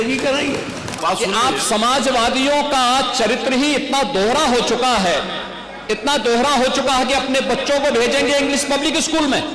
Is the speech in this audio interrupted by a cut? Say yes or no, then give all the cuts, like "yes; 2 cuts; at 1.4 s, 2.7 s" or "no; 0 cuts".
yes; 1 cut; at 0.9 s